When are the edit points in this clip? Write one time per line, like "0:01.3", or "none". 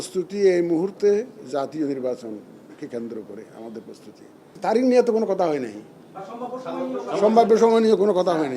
0:04.5